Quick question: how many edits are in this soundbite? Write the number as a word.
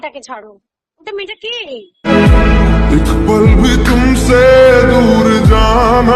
zero